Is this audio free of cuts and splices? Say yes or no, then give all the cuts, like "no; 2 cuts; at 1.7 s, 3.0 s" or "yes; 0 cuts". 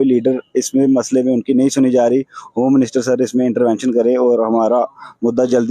yes; 0 cuts